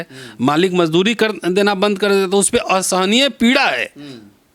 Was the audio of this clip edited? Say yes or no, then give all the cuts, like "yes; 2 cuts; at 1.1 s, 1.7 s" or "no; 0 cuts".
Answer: no; 0 cuts